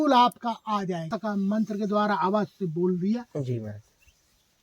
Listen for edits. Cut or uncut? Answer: cut